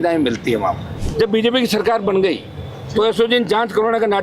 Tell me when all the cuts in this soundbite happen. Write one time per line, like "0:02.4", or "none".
0:00.9